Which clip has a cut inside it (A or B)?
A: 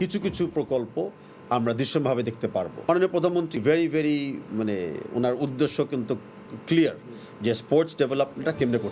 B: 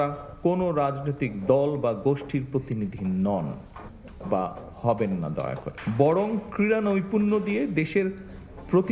A